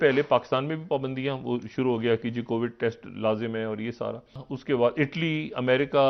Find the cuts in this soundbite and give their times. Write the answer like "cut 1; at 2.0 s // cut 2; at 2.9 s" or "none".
cut 1; at 4.5 s